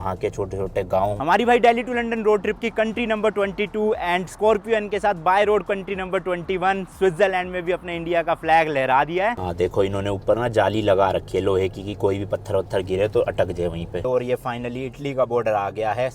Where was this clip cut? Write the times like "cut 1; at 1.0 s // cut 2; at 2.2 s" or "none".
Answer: cut 1; at 1.2 s // cut 2; at 9.4 s // cut 3; at 14.0 s